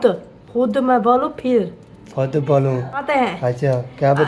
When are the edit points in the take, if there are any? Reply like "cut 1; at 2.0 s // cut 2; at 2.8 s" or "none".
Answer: cut 1; at 3.1 s